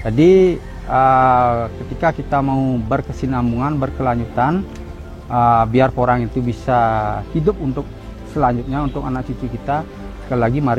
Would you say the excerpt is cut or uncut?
uncut